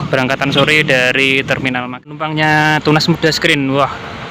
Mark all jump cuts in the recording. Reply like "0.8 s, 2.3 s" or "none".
1.8 s